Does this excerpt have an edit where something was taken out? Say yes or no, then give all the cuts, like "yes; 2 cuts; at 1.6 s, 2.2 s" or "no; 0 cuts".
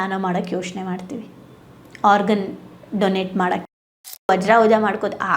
yes; 1 cut; at 4.3 s